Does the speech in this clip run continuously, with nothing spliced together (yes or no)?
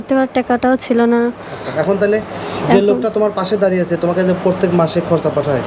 yes